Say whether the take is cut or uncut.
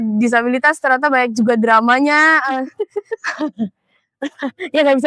uncut